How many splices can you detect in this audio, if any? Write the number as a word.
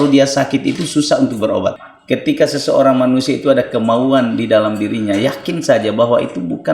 one